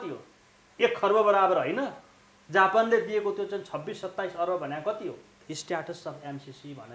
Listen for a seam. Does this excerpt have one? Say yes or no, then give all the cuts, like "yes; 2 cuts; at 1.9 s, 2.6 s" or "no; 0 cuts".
yes; 1 cut; at 5.4 s